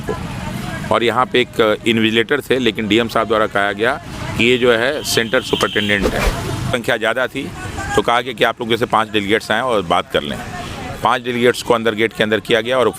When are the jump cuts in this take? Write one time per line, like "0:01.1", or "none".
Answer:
0:06.7